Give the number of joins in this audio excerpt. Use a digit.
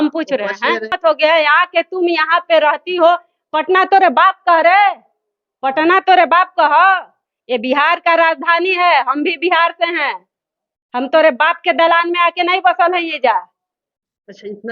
1